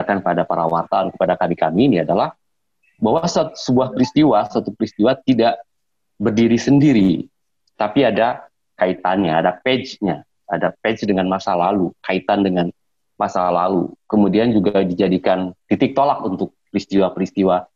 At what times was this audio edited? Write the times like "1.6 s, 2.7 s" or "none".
15.6 s